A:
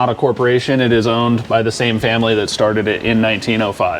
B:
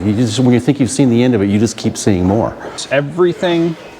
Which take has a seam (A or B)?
B